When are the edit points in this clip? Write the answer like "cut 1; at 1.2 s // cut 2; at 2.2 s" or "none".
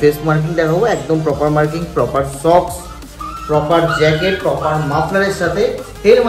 none